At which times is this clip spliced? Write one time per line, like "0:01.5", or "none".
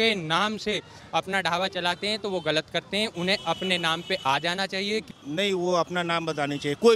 0:05.1